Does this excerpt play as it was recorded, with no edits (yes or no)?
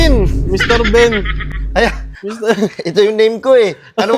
yes